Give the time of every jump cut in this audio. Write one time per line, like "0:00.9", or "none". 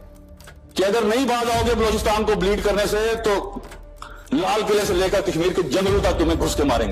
none